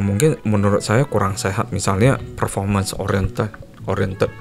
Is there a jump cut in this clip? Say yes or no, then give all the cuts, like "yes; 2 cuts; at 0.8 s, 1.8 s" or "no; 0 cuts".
no; 0 cuts